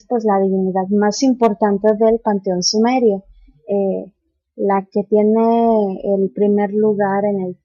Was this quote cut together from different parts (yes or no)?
yes